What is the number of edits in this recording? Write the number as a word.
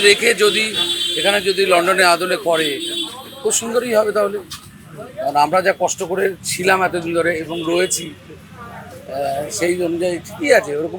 zero